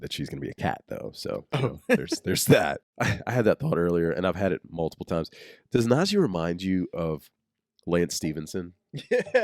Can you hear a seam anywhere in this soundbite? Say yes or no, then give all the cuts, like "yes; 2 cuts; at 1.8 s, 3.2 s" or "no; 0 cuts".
yes; 1 cut; at 2.9 s